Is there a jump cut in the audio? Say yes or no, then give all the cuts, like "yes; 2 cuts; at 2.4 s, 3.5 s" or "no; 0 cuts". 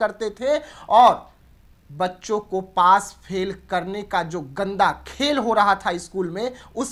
no; 0 cuts